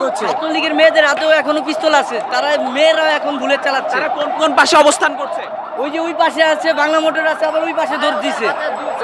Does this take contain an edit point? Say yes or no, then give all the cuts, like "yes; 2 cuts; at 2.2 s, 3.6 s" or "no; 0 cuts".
no; 0 cuts